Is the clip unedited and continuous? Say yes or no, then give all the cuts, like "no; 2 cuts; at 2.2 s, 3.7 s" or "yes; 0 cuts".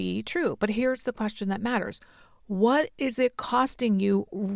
yes; 0 cuts